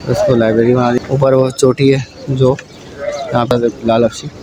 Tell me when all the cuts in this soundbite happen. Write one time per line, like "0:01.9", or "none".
0:01.0